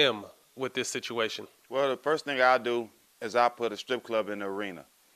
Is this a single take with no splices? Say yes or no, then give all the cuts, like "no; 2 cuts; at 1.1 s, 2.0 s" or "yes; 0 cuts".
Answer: no; 1 cut; at 1.5 s